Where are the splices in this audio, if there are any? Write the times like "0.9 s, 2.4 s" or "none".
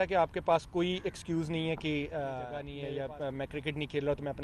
2.7 s